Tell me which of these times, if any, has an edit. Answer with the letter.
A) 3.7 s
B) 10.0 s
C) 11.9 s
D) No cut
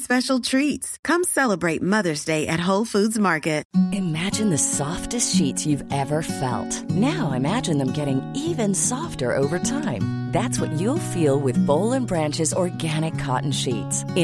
A